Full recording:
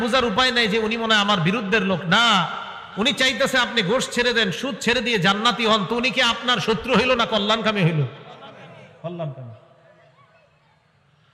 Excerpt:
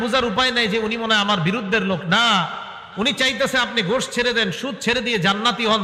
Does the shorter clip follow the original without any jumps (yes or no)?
yes